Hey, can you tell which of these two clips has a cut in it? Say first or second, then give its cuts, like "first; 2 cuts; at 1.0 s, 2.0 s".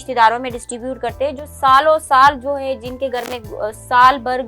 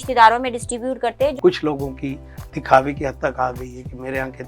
second; 1 cut; at 1.4 s